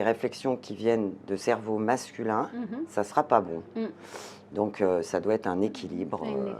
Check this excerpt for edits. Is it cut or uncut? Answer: uncut